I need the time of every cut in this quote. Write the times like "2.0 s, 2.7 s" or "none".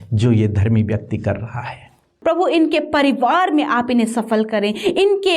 2.1 s

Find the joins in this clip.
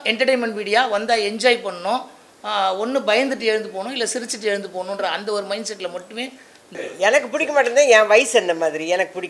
6.7 s

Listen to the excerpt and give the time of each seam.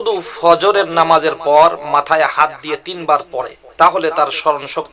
3.6 s

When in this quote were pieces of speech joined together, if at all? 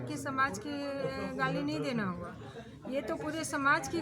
none

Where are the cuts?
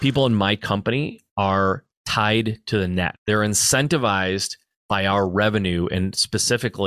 1.2 s, 3.2 s

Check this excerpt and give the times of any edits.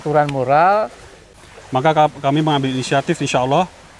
1.3 s

